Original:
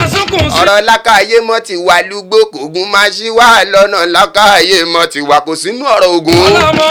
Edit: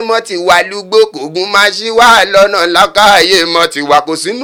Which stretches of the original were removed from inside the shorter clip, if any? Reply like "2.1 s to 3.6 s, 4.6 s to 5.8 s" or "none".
none